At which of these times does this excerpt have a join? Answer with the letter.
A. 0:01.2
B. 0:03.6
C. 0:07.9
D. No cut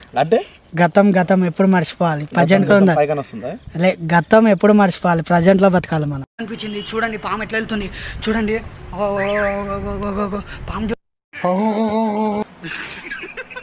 D